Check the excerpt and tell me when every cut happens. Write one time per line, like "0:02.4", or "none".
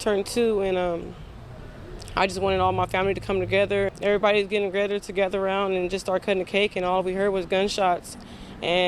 0:03.9